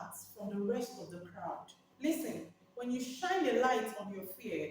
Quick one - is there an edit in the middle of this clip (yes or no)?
yes